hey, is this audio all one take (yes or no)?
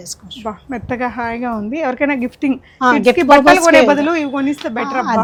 yes